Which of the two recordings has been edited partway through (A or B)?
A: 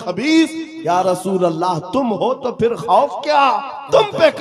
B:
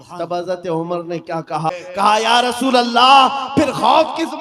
B